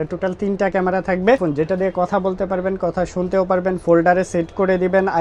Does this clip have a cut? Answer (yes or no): yes